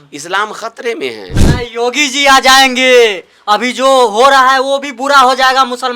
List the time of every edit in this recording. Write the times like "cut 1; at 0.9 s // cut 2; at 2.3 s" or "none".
cut 1; at 1.4 s